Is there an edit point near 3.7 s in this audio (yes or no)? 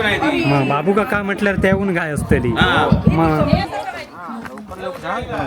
yes